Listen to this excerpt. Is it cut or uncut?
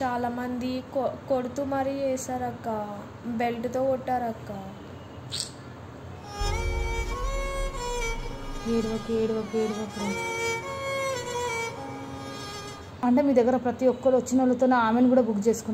cut